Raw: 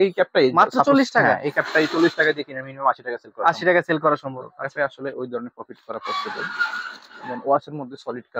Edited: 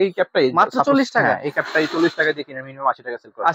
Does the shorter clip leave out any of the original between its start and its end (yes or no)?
no